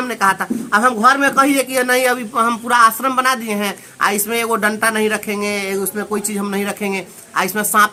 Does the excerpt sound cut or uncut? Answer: uncut